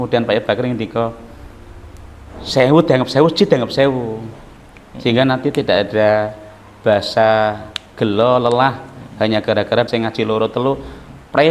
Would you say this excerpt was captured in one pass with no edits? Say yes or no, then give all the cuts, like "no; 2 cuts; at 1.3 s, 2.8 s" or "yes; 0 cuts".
no; 1 cut; at 9.9 s